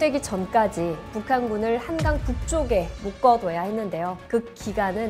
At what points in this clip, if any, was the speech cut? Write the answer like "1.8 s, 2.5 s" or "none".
1.1 s, 4.2 s